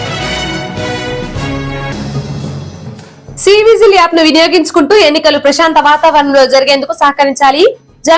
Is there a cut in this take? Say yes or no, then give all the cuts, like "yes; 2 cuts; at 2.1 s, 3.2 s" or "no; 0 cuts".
yes; 1 cut; at 2.6 s